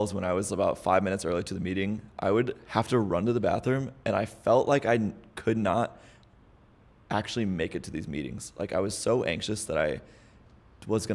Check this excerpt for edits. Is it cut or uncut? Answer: uncut